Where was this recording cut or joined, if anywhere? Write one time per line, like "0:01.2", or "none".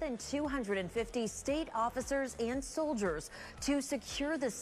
none